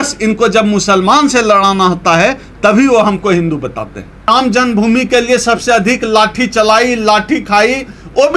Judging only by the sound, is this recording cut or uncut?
cut